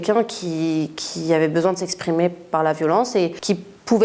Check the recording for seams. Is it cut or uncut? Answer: uncut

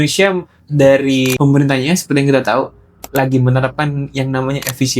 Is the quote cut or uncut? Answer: cut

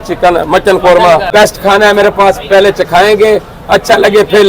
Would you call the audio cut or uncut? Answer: cut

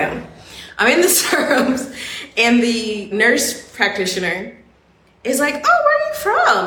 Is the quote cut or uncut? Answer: cut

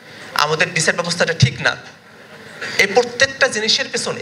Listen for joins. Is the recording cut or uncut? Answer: uncut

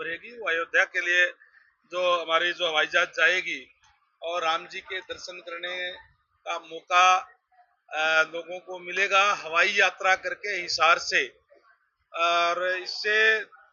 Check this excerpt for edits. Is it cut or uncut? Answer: uncut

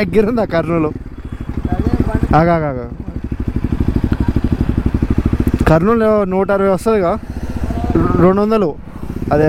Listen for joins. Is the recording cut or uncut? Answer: uncut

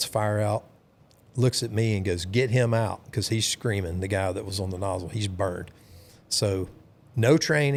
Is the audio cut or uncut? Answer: uncut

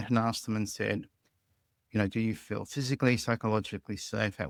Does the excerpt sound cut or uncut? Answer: uncut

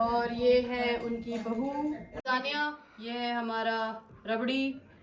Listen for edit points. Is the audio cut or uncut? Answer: cut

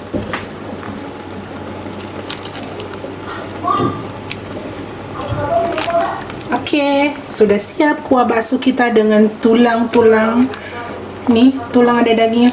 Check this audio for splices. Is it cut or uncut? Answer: cut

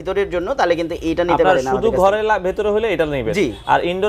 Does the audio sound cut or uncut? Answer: uncut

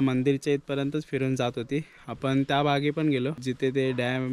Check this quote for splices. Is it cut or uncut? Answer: cut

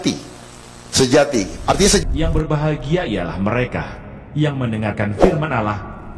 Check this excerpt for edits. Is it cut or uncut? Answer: cut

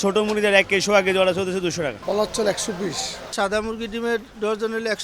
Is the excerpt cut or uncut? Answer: cut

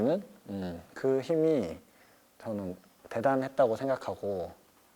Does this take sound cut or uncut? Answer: uncut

